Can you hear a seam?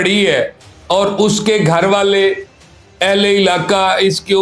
no; 0 cuts

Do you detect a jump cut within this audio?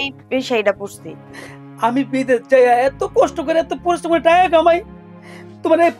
no; 0 cuts

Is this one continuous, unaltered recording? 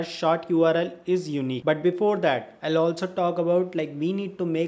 yes; 0 cuts

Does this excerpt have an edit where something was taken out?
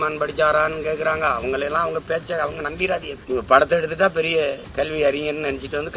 yes; 2 cuts; at 3.1 s, 4.6 s

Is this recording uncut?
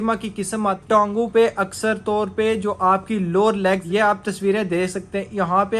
no; 2 cuts; at 0.8 s, 3.8 s

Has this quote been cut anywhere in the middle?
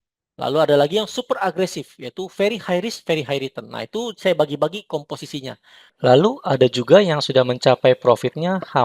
yes; 1 cut; at 5.8 s

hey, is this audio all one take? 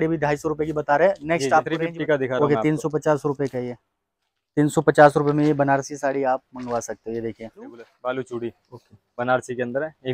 no; 2 cuts; at 1.7 s, 7.9 s

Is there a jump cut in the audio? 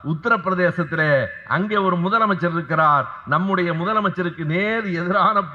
no; 0 cuts

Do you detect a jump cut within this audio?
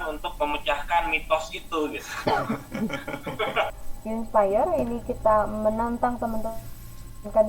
yes; 1 cut; at 3.9 s

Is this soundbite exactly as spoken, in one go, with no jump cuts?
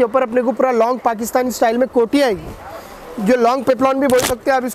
yes; 0 cuts

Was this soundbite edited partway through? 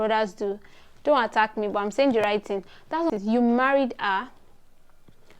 yes; 1 cut; at 3.1 s

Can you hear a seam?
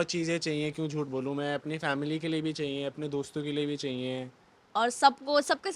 yes; 1 cut; at 4.6 s

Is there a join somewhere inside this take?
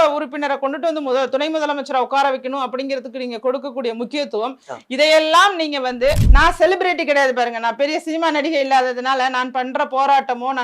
yes; 1 cut; at 6.3 s

